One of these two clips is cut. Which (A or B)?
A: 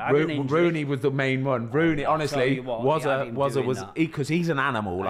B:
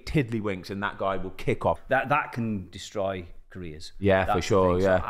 B